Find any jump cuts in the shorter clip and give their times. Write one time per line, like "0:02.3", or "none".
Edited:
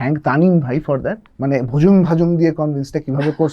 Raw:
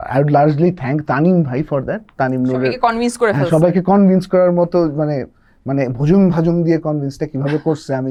0:01.2